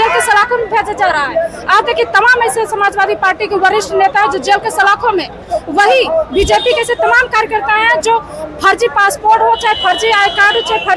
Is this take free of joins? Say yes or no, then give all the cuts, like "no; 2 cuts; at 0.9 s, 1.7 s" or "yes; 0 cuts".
yes; 0 cuts